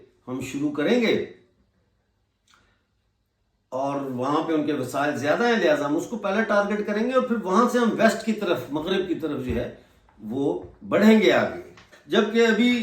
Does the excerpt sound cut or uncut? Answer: cut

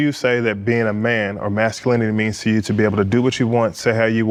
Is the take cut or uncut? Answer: uncut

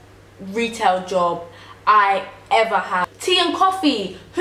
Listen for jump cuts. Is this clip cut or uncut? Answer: cut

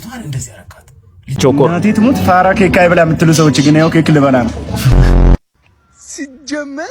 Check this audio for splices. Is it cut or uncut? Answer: cut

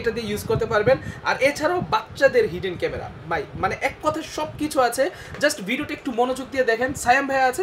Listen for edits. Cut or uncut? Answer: uncut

